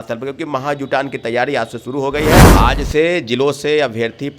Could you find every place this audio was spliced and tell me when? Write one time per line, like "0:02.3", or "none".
0:02.4